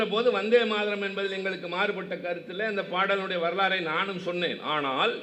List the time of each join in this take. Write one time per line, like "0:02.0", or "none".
none